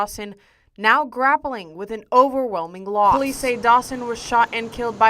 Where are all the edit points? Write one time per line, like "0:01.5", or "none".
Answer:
0:03.2